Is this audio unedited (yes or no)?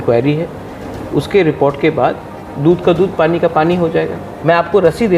no